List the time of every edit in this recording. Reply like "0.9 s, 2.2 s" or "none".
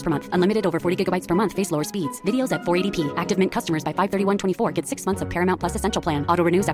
none